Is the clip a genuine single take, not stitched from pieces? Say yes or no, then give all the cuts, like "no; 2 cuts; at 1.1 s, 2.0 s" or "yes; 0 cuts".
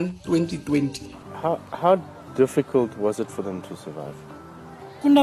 no; 1 cut; at 1.1 s